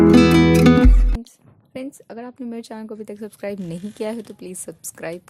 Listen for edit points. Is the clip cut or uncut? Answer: cut